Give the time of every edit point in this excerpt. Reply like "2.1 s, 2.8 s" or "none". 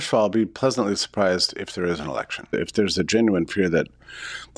2.5 s